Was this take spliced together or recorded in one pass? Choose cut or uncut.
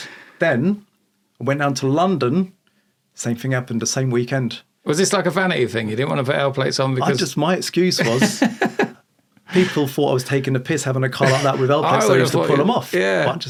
uncut